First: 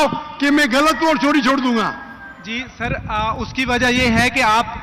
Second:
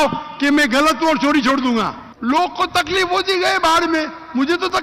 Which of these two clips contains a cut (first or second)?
second